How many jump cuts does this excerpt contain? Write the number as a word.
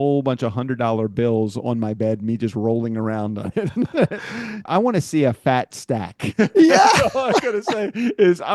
one